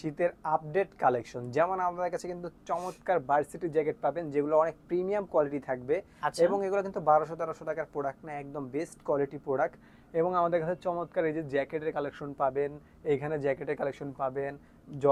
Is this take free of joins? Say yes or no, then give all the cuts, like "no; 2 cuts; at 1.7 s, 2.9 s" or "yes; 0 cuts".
yes; 0 cuts